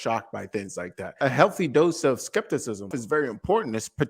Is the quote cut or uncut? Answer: cut